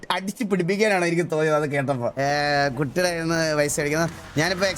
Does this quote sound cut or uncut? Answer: cut